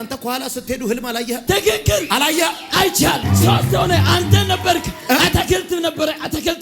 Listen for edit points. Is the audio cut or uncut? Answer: cut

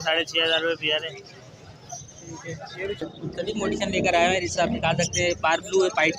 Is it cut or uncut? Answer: cut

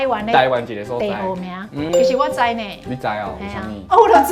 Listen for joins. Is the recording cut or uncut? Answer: cut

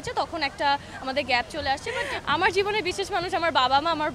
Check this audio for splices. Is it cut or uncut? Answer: cut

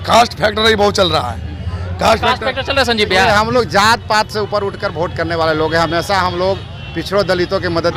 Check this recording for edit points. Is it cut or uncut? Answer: uncut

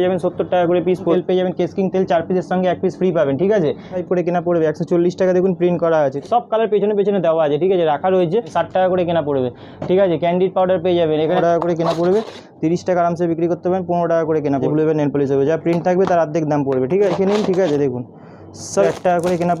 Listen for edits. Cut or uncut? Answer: cut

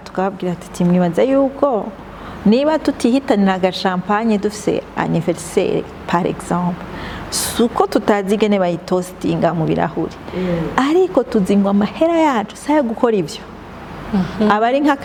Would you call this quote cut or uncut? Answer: uncut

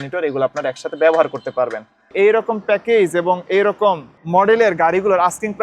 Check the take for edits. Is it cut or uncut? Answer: cut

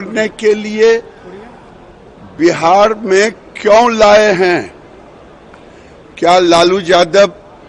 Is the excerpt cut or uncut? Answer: uncut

